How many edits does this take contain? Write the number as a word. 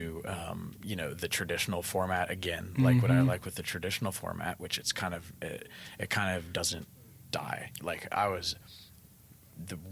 one